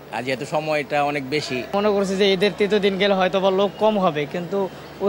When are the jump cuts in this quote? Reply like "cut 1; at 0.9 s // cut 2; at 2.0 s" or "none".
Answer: cut 1; at 1.7 s